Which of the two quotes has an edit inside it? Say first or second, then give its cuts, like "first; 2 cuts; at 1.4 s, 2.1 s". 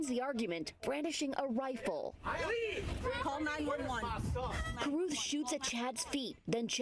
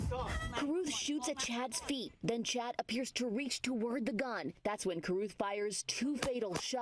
first; 1 cut; at 3.2 s